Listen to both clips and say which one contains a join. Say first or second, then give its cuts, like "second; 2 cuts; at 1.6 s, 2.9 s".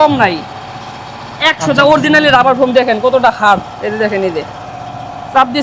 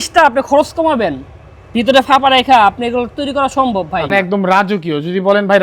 second; 1 cut; at 4.1 s